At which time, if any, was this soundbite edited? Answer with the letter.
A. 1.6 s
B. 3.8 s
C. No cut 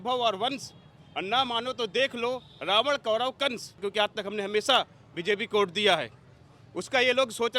B